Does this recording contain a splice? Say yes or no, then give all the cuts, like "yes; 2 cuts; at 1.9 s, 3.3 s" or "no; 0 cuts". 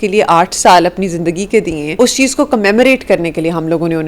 yes; 1 cut; at 1.8 s